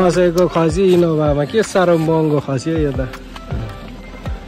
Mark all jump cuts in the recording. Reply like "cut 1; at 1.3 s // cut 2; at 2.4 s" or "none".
none